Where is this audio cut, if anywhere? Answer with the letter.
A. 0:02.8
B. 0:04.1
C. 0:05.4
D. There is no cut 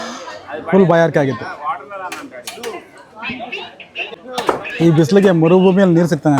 B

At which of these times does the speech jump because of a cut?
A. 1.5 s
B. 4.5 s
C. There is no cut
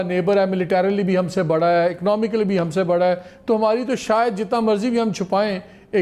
C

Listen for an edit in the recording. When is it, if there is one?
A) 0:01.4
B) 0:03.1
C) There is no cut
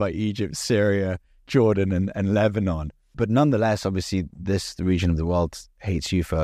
B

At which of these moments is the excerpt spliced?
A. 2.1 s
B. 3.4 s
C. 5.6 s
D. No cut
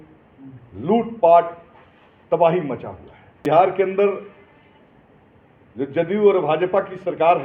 B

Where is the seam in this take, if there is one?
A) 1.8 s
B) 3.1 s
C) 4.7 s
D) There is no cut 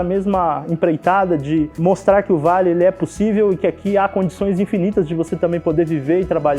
A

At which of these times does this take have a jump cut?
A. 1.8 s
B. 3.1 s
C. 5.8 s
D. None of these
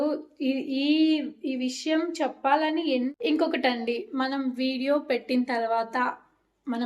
B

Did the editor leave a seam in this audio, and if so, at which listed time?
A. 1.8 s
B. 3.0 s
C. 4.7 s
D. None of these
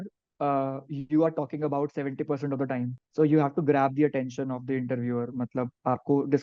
B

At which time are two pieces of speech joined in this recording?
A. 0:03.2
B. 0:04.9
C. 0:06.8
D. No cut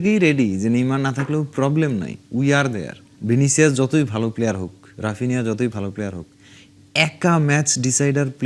A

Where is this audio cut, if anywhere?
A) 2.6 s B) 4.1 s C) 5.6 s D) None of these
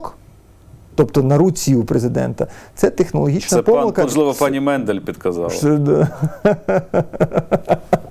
B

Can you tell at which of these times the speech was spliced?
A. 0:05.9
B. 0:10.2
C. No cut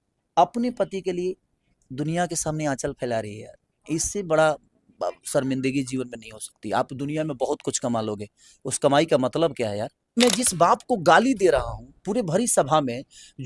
B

